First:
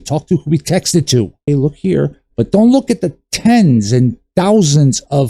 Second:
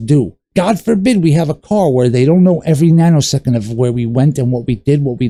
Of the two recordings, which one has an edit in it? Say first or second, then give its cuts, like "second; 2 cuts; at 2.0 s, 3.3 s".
first; 1 cut; at 1.4 s